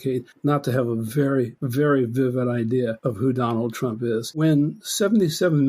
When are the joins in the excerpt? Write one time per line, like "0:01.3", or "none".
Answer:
0:01.6
0:03.0
0:04.4